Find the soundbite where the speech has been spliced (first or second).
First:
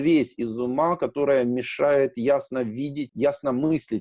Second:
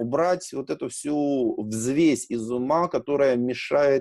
first